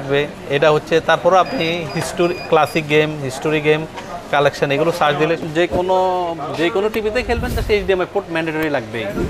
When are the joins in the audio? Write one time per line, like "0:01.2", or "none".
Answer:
0:05.4

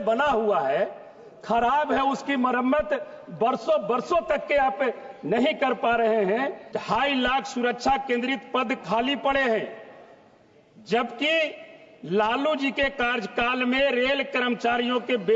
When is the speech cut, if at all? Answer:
0:06.7

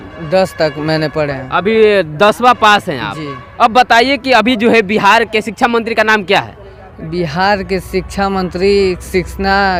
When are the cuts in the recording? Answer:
none

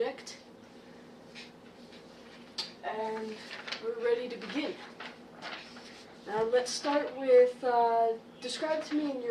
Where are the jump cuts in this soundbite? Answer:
none

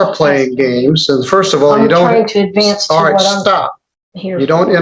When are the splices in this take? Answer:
none

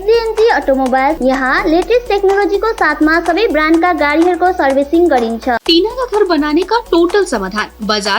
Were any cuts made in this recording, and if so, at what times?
0:01.2
0:05.6

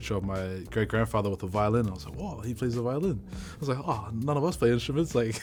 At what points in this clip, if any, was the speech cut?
none

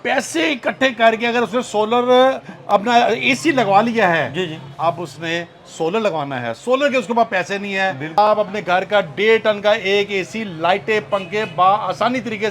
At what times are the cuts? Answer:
0:08.2

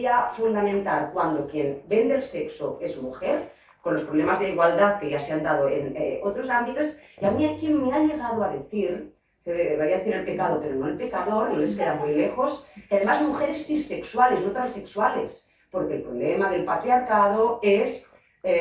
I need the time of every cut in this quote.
none

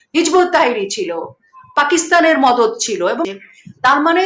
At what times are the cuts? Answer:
0:03.2

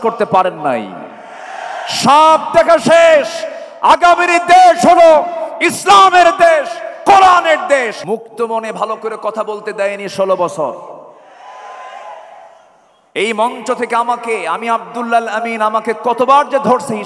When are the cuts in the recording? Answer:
0:08.0

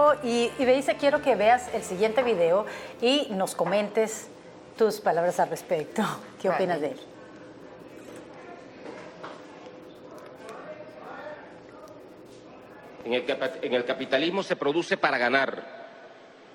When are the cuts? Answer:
none

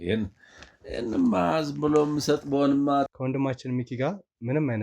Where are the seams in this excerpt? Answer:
0:03.1

